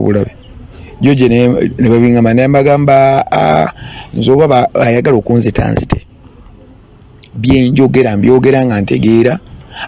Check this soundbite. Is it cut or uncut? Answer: uncut